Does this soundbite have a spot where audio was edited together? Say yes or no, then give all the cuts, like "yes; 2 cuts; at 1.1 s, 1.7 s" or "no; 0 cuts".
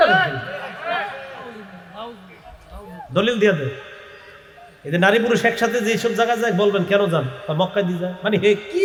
no; 0 cuts